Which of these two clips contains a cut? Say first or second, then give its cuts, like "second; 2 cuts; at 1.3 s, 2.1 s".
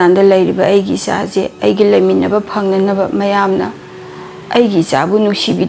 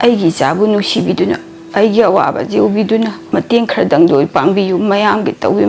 second; 1 cut; at 3.2 s